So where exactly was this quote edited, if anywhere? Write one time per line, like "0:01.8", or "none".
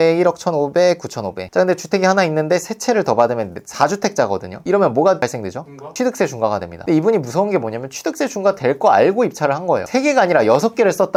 none